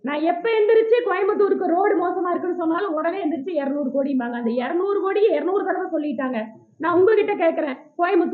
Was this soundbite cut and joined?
no; 0 cuts

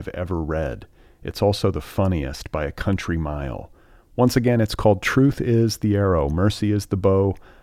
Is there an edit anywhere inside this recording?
no; 0 cuts

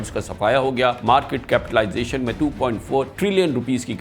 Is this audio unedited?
no; 2 cuts; at 1.0 s, 2.3 s

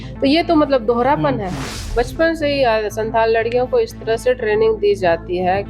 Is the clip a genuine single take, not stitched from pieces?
no; 1 cut; at 1.8 s

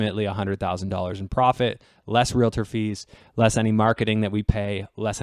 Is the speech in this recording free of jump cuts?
yes; 0 cuts

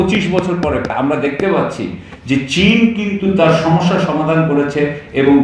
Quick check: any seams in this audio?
yes; 1 cut; at 0.9 s

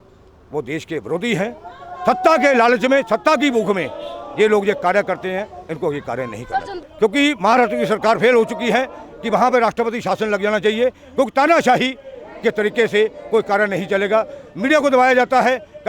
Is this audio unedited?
no; 1 cut; at 6.8 s

